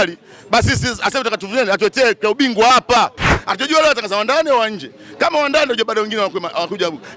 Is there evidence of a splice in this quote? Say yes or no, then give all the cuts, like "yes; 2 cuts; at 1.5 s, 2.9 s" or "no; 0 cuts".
yes; 1 cut; at 3.3 s